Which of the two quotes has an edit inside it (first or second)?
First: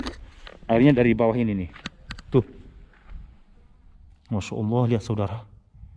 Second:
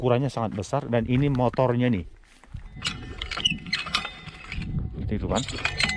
second